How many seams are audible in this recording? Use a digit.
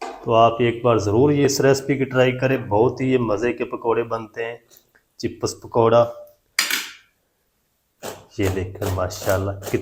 0